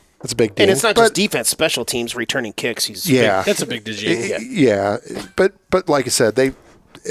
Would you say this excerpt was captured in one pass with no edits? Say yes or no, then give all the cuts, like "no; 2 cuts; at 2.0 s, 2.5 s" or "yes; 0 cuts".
yes; 0 cuts